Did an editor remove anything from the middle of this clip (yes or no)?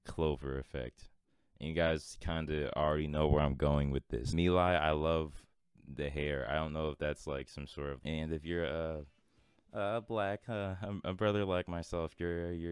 yes